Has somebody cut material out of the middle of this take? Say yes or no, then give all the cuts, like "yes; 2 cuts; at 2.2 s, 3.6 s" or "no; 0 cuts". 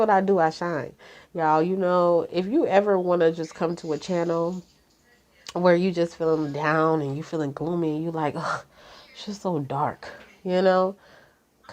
no; 0 cuts